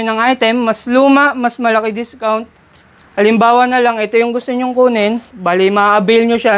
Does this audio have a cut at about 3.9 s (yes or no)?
no